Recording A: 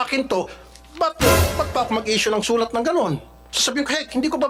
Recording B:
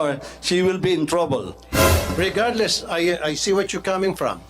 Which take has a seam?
B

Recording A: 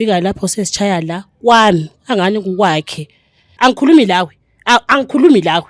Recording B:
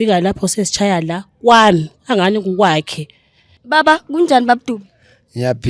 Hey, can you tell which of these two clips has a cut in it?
A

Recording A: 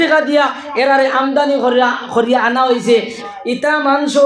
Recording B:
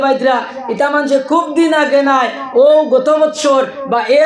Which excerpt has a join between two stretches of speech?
A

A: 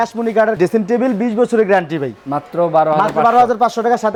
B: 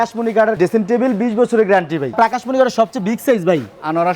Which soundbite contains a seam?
B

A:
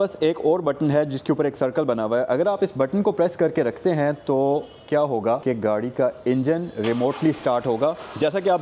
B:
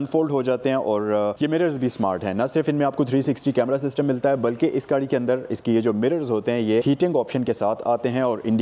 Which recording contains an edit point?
B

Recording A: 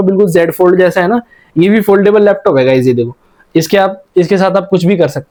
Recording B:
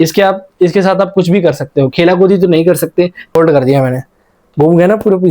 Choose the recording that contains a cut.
B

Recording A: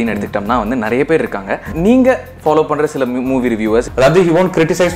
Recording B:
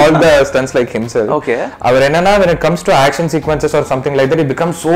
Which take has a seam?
A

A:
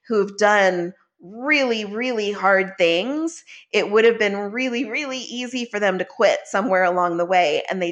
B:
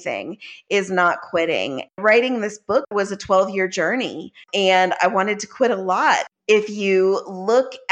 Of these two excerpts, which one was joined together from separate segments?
B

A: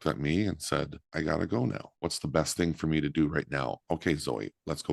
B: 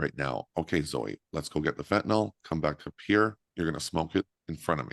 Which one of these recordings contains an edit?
A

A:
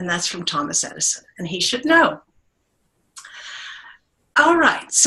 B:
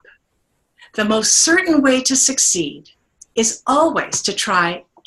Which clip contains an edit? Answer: B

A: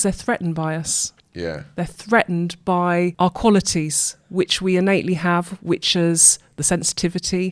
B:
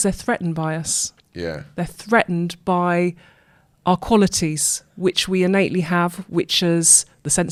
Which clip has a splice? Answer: A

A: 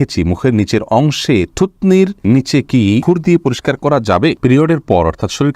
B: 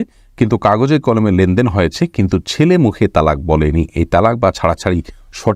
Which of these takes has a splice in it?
A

